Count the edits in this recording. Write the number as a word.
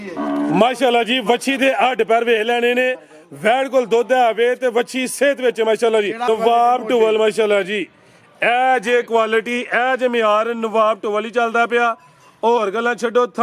one